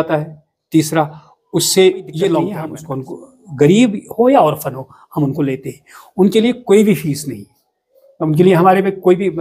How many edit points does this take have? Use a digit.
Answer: 1